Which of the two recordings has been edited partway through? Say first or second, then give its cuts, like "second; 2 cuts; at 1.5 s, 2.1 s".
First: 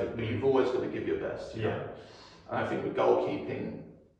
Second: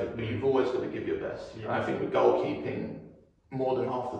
second; 1 cut; at 1.5 s